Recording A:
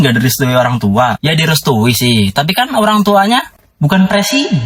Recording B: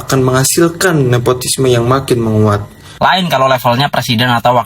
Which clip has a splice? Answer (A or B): B